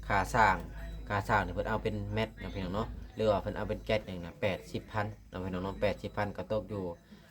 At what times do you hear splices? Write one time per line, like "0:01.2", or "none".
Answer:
0:04.1